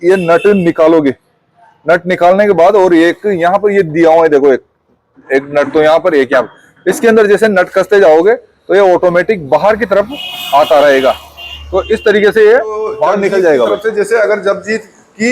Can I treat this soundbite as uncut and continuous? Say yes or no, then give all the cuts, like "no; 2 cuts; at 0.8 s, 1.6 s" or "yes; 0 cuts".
no; 1 cut; at 13.8 s